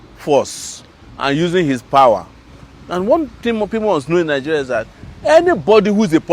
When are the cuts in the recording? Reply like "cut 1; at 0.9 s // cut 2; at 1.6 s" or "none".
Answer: none